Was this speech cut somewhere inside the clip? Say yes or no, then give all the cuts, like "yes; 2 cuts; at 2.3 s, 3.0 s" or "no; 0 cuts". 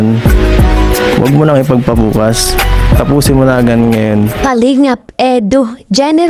yes; 1 cut; at 4.4 s